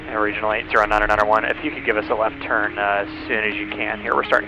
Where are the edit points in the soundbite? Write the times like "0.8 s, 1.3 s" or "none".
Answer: none